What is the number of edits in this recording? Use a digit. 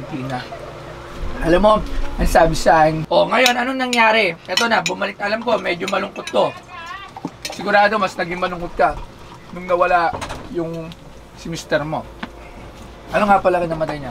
1